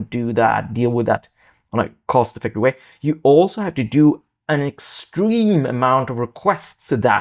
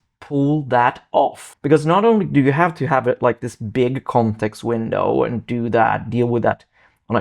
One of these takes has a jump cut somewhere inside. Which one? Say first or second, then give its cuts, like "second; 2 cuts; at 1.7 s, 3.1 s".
second; 1 cut; at 1.5 s